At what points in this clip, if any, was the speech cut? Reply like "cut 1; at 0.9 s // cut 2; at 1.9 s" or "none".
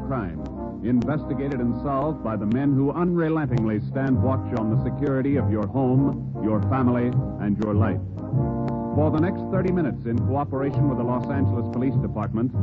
cut 1; at 6.6 s